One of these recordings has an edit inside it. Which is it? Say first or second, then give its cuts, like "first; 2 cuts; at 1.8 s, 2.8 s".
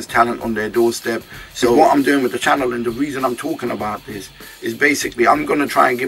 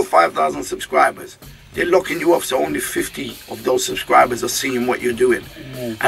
first; 1 cut; at 1.8 s